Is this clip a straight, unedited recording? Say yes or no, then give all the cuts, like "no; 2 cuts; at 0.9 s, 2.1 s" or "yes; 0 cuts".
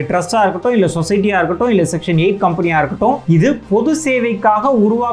no; 1 cut; at 3.2 s